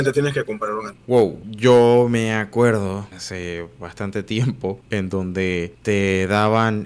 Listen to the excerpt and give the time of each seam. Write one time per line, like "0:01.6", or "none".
0:01.4
0:03.2
0:04.8
0:05.7